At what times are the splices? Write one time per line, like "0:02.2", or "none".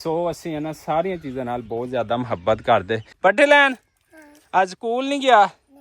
0:03.0